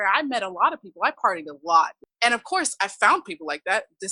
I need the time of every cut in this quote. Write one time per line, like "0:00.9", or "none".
0:02.0